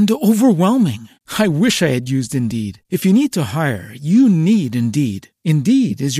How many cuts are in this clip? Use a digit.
0